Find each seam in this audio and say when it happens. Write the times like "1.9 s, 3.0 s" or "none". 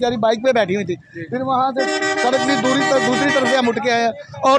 none